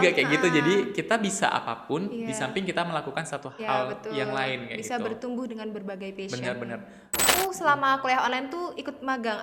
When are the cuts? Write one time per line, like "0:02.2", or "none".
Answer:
0:07.3